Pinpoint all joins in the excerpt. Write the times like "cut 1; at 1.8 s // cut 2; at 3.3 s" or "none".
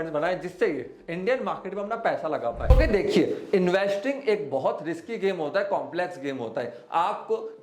cut 1; at 2.7 s